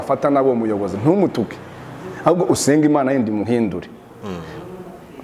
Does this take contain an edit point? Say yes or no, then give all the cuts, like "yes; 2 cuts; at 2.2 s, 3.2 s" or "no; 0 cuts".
no; 0 cuts